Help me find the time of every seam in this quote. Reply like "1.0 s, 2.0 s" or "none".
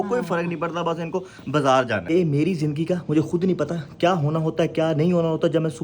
2.1 s